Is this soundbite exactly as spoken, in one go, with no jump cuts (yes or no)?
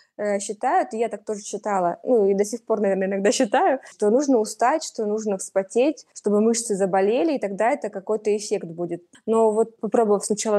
no